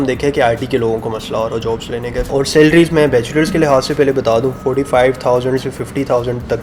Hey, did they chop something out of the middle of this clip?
yes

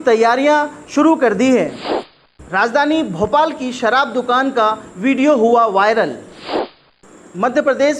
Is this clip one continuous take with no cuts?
no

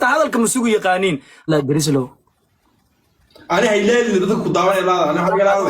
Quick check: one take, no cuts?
no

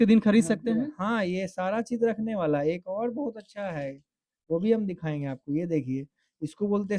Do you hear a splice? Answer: no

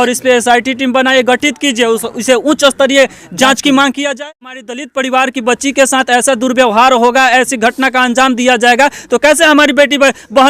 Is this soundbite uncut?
no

